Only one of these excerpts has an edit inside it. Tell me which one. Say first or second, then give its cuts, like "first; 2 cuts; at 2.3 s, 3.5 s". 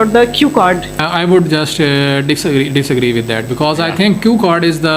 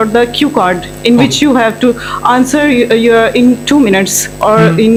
first; 1 cut; at 1.0 s